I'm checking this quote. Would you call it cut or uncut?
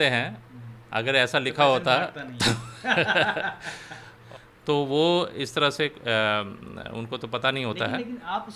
uncut